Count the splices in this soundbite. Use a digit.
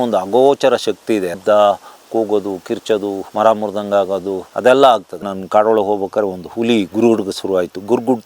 4